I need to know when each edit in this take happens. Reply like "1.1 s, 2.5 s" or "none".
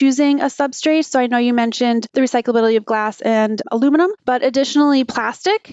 2.1 s, 4.0 s

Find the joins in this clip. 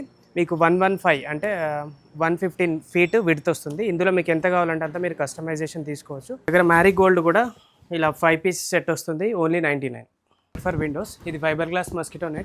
6.5 s, 10.6 s

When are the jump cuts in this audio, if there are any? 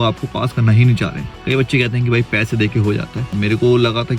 1.4 s, 3.3 s

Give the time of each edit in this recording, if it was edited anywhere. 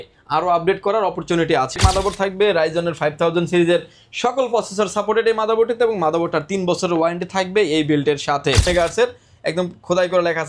1.8 s, 8.6 s

